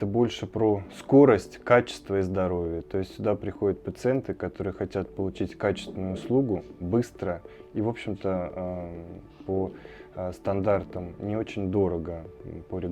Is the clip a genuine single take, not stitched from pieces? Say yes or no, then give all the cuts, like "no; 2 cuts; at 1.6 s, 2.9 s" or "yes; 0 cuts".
yes; 0 cuts